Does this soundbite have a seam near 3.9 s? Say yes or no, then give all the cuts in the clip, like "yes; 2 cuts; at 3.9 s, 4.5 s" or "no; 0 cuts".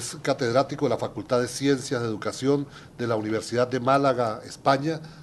no; 1 cut; at 2.5 s